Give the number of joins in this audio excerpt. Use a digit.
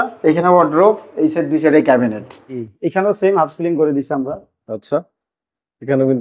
1